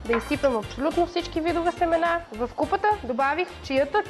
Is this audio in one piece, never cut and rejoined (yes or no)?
no